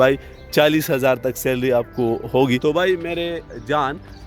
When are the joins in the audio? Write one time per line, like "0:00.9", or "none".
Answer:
0:02.6